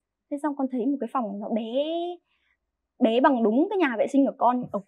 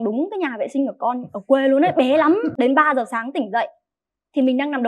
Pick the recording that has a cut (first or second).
second